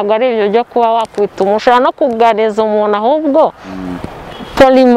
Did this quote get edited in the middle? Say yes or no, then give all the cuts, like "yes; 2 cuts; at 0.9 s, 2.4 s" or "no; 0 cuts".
no; 0 cuts